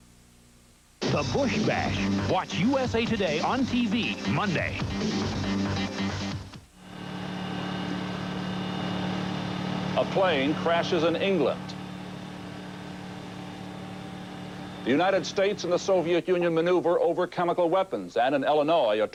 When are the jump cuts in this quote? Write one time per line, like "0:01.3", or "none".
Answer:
none